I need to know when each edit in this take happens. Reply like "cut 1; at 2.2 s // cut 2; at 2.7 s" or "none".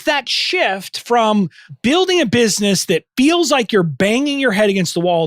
cut 1; at 1.6 s